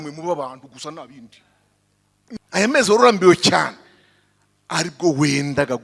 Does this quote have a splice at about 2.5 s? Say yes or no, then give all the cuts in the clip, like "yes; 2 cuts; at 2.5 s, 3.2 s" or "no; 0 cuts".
yes; 1 cut; at 2.5 s